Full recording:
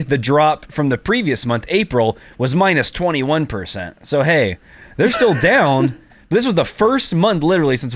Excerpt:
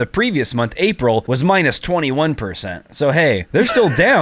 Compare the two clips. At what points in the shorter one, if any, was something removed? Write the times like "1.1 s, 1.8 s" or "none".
1.3 s, 3.4 s